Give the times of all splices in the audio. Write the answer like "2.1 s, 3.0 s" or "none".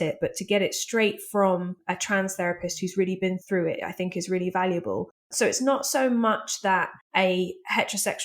1.8 s, 3.4 s, 5.3 s, 7.0 s